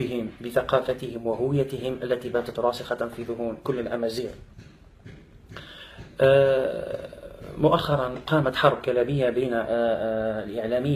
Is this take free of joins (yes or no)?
yes